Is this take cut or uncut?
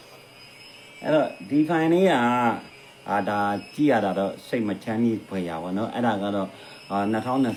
uncut